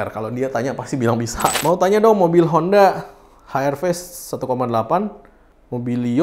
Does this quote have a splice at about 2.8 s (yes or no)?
no